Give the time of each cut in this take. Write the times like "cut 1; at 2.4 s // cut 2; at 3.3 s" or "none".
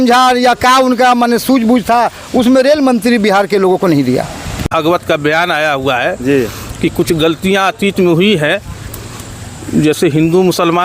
cut 1; at 4.7 s